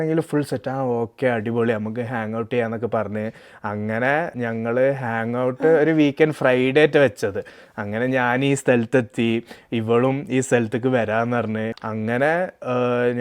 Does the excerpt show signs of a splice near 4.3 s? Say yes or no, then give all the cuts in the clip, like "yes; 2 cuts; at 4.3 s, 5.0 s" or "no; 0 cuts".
yes; 2 cuts; at 4.3 s, 11.8 s